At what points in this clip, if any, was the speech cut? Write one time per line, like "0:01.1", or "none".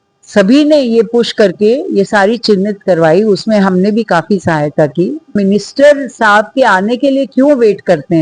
0:05.4